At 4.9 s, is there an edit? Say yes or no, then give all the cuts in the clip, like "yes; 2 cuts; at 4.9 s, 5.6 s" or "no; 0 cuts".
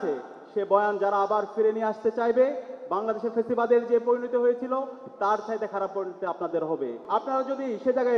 no; 1 cut; at 7.0 s